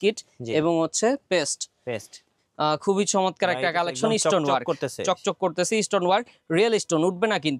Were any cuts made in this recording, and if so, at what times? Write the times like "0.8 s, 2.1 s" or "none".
2.3 s